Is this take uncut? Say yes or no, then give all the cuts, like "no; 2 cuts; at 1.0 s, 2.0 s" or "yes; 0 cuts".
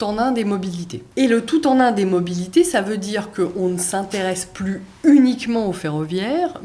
no; 1 cut; at 0.9 s